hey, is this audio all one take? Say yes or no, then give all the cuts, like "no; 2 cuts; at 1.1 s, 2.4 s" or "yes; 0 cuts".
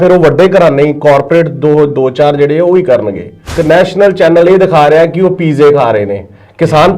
no; 1 cut; at 3.5 s